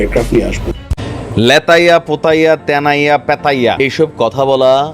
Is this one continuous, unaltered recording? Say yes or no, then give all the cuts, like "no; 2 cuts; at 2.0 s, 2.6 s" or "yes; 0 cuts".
no; 2 cuts; at 1.0 s, 3.8 s